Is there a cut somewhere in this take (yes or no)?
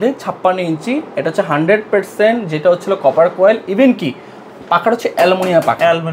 no